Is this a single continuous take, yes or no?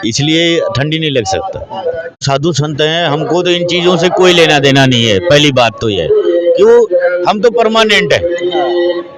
no